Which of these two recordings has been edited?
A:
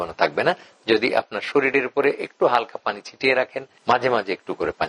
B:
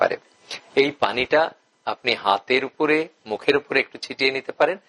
A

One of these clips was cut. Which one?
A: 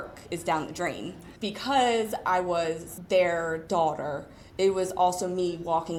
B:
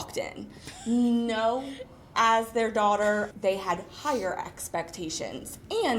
B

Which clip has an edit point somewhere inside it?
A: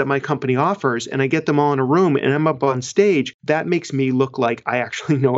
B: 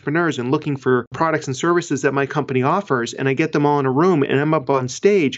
B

